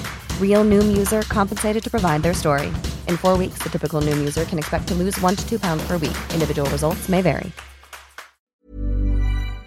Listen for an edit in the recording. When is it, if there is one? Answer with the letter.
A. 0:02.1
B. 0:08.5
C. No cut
B